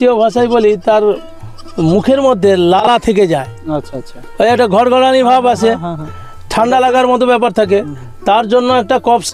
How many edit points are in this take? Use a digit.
0